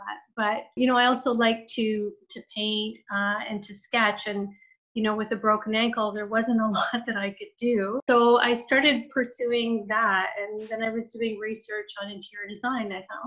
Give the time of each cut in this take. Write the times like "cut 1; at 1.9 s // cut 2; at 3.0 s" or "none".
cut 1; at 8.0 s